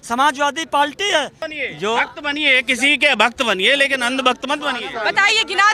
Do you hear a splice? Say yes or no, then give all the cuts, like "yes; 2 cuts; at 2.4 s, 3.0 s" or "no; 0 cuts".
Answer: yes; 1 cut; at 1.4 s